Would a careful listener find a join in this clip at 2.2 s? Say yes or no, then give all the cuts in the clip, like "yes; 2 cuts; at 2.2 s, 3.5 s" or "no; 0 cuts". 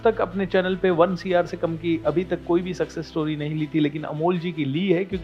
no; 0 cuts